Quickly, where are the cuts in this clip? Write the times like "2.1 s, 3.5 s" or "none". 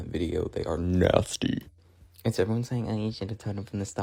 none